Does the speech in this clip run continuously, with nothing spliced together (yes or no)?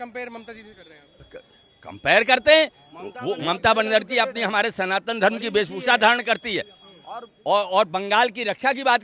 no